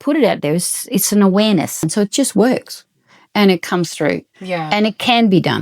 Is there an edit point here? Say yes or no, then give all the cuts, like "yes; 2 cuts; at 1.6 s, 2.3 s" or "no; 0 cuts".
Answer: yes; 1 cut; at 1.8 s